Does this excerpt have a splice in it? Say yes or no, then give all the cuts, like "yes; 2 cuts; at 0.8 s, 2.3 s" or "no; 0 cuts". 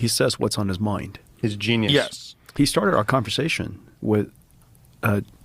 yes; 1 cut; at 2.5 s